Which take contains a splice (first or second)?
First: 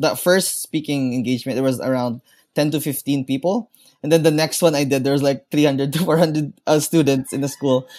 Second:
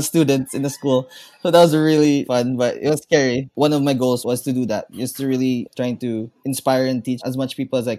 second